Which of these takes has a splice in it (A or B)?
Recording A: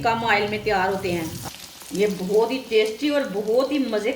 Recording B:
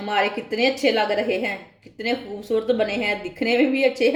A